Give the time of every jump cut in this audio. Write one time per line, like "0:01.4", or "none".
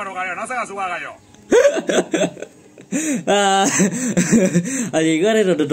none